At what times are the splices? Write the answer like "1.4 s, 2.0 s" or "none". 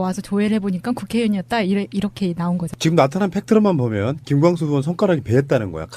none